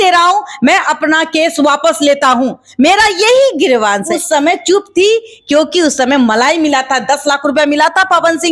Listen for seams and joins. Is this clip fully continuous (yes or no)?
no